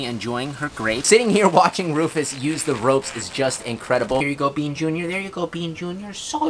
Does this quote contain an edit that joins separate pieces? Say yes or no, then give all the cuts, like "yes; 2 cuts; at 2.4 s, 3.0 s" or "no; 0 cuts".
yes; 2 cuts; at 1.0 s, 4.2 s